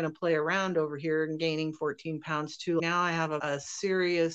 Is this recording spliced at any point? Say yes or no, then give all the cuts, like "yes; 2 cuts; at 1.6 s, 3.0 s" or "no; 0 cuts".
no; 0 cuts